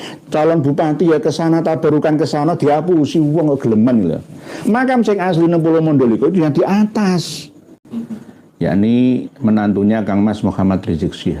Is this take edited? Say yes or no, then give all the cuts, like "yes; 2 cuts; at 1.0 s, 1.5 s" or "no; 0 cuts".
yes; 1 cut; at 7.8 s